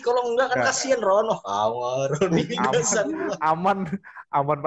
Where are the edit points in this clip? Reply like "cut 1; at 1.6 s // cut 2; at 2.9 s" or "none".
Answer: none